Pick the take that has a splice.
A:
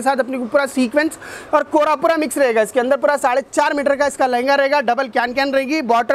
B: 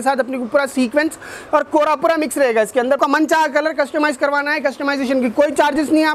B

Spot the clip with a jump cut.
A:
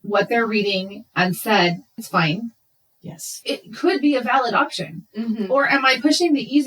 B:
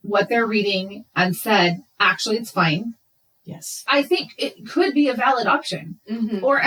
A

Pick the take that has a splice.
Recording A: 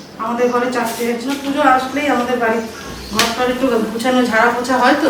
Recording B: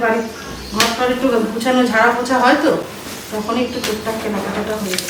A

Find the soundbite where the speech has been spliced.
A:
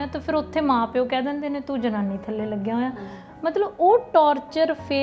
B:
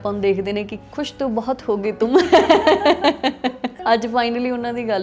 B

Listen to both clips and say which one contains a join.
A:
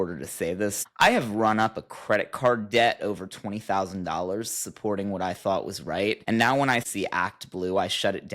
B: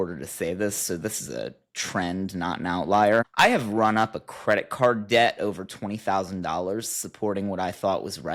A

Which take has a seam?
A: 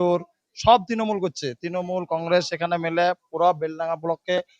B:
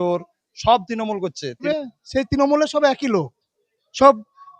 A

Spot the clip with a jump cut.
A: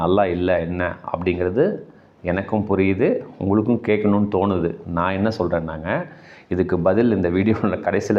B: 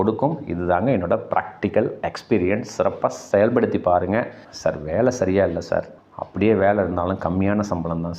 B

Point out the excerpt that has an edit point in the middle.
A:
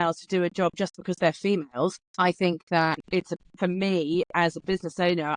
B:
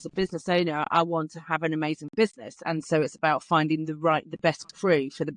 A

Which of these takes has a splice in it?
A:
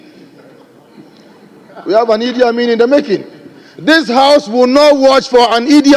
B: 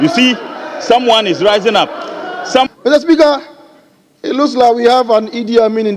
B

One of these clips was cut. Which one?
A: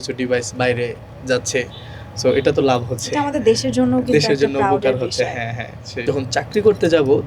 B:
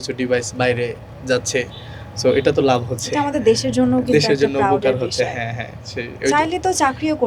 A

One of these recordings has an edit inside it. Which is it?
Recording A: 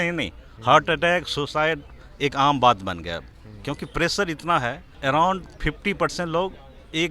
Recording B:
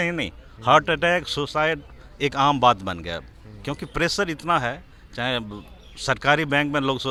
A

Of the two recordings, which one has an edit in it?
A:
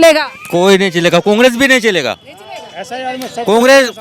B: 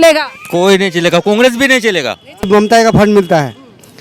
B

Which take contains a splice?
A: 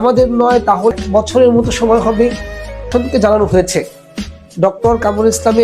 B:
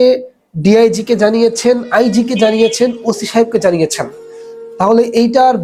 A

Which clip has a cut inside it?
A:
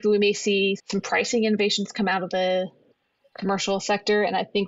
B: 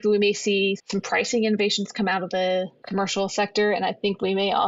B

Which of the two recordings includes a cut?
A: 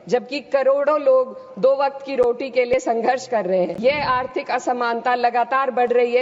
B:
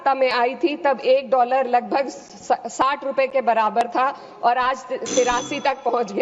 A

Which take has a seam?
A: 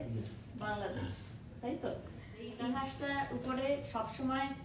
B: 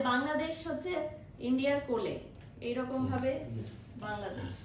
A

